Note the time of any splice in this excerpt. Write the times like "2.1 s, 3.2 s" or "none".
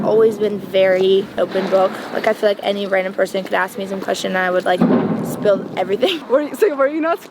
1.3 s, 6.2 s